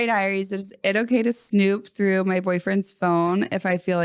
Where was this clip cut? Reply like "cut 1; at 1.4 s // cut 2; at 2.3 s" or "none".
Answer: none